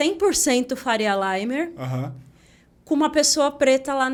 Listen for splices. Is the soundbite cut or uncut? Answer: uncut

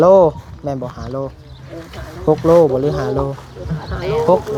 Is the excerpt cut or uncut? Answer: uncut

